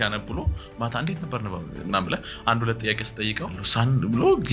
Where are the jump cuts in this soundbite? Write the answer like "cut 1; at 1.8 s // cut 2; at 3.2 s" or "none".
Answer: cut 1; at 3.6 s